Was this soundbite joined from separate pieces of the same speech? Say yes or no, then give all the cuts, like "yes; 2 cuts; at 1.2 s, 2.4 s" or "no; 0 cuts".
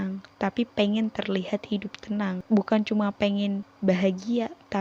yes; 2 cuts; at 2.4 s, 3.7 s